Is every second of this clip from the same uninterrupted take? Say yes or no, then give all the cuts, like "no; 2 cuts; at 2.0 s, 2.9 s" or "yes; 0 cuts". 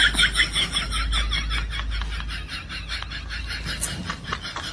yes; 0 cuts